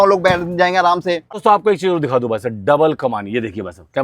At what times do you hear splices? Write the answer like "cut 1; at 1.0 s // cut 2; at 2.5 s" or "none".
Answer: cut 1; at 1.2 s